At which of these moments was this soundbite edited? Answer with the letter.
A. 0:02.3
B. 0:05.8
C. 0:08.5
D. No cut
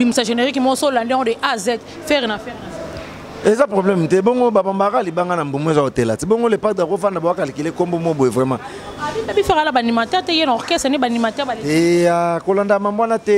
D